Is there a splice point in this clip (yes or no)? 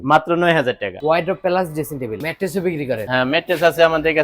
yes